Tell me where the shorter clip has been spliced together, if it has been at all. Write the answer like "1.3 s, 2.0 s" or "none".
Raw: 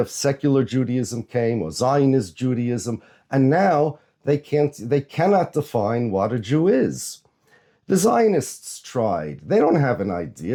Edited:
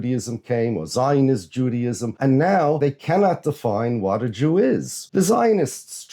2.1 s, 2.8 s, 5.0 s